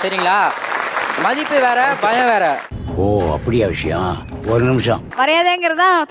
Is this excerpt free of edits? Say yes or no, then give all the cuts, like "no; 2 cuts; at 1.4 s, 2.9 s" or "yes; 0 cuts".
yes; 0 cuts